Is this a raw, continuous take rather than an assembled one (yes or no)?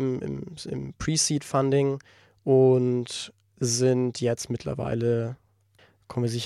no